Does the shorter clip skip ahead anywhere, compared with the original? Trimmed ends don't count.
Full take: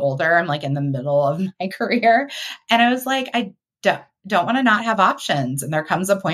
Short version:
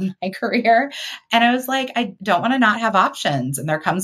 yes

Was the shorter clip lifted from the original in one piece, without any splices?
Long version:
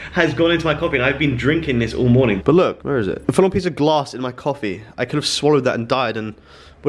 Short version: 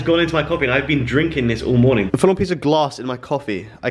no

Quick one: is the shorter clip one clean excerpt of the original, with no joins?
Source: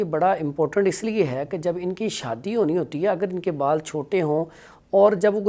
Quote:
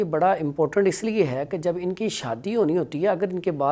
yes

